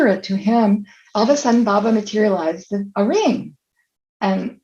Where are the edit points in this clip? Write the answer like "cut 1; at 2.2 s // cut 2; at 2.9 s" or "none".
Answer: cut 1; at 1.0 s